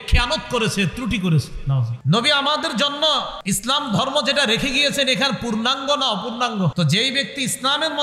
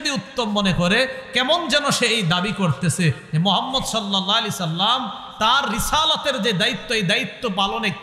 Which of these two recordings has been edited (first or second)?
first